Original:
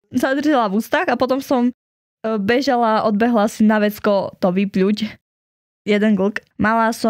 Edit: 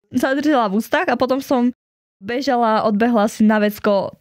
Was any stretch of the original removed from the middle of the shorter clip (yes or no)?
yes